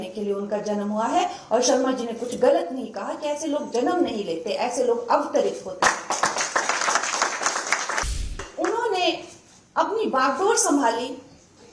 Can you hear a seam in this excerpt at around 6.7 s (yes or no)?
no